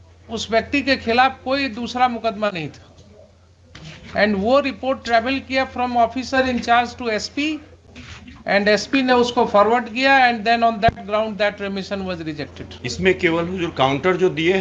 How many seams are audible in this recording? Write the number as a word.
zero